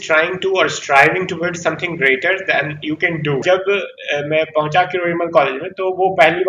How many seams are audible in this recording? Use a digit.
1